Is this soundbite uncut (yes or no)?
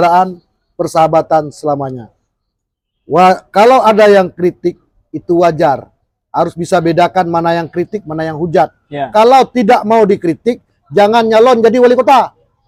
yes